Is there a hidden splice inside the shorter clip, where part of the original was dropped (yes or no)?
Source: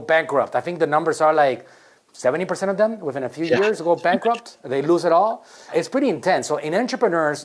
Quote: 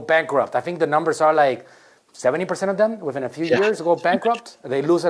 no